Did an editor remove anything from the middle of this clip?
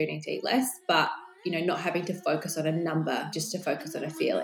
yes; 1 cut; at 3.4 s

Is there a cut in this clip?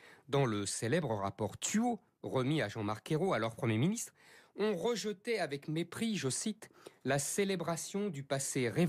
no; 0 cuts

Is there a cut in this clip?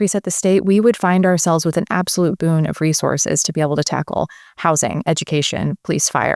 no; 0 cuts

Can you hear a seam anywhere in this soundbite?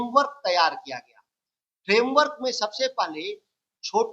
no; 0 cuts

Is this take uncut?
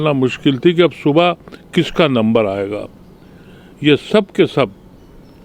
yes; 0 cuts

